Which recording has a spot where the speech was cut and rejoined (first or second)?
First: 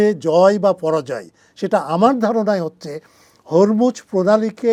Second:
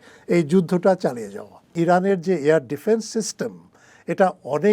second